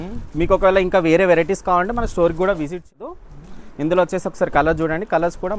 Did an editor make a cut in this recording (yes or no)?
yes